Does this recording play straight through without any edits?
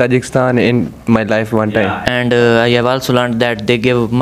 no; 1 cut; at 2.0 s

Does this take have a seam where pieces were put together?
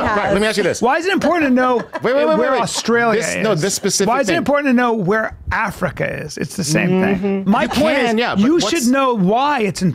yes; 1 cut; at 7.4 s

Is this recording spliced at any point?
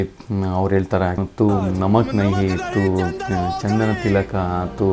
yes; 1 cut; at 1.2 s

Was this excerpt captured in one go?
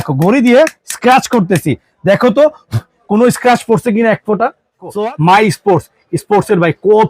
no; 1 cut; at 5.0 s

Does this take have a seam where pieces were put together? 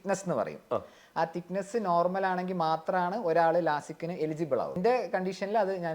yes; 1 cut; at 4.8 s

